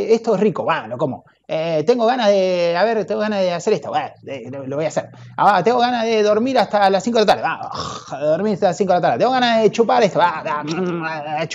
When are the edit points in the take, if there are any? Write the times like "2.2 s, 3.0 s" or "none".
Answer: none